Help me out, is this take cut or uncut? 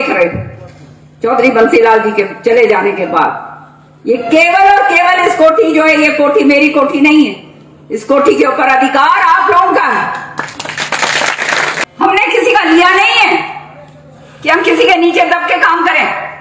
cut